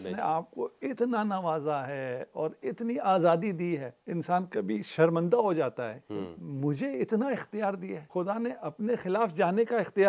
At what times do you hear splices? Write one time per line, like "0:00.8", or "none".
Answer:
0:04.0
0:08.0